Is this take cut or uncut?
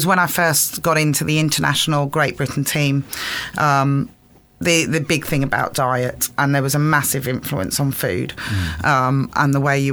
uncut